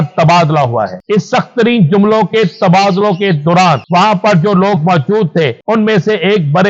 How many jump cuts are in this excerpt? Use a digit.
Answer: 3